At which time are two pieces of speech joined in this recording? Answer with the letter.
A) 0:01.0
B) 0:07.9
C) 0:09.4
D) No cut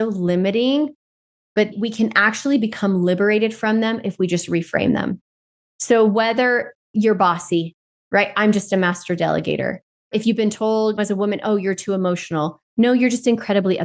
D